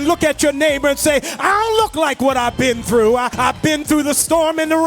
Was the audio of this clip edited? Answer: yes; 1 cut; at 3.3 s

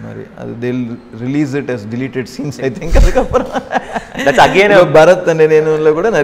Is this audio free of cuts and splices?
yes; 0 cuts

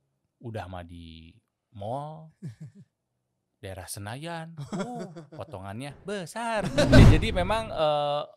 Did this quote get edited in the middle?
yes; 1 cut; at 7.0 s

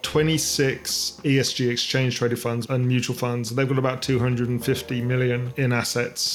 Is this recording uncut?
no; 2 cuts; at 1.2 s, 2.6 s

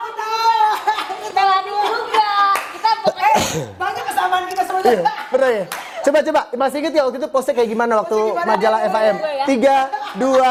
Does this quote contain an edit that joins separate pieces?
no; 0 cuts

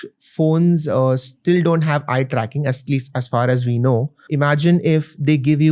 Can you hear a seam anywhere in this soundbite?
yes; 1 cut; at 4.2 s

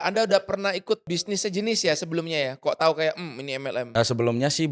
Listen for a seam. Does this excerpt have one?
yes; 2 cuts; at 1.5 s, 3.8 s

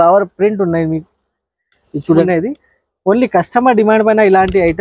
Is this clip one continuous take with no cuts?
no; 1 cut; at 2.2 s

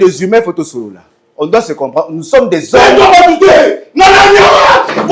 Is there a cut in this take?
no; 0 cuts

